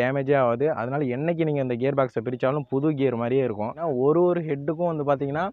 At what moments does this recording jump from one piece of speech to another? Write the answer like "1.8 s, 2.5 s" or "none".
3.8 s